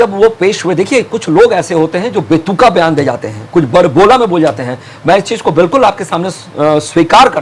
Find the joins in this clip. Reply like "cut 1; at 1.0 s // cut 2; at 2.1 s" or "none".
none